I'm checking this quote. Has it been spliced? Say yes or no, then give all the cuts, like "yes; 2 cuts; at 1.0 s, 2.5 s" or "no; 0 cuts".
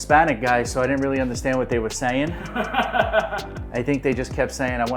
no; 0 cuts